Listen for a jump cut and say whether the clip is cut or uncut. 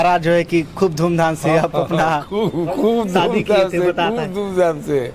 uncut